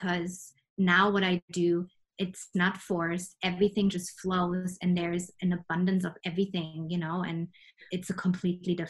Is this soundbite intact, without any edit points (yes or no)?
yes